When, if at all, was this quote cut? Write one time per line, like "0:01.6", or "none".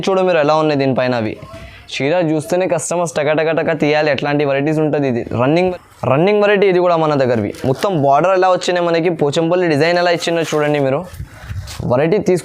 0:05.5